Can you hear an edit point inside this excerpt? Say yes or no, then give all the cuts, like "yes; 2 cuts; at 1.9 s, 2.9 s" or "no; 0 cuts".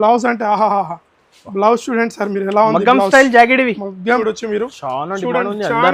yes; 1 cut; at 4.2 s